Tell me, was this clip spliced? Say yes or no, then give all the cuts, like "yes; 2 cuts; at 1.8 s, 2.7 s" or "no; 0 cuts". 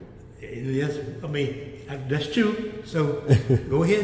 no; 0 cuts